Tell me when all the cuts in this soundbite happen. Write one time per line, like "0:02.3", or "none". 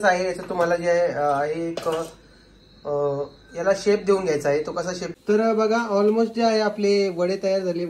0:05.0